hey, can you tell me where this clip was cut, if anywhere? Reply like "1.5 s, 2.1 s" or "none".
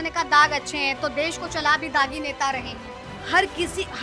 3.1 s